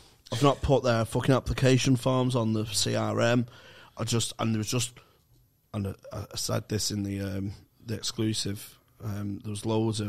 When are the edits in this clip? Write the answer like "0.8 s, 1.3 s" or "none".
none